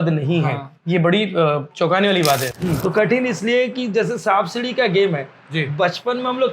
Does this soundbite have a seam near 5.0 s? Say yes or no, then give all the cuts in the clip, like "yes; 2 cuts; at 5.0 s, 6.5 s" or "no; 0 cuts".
no; 1 cut; at 2.5 s